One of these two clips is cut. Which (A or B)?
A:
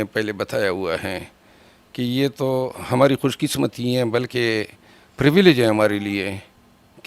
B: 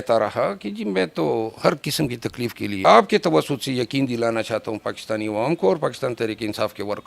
B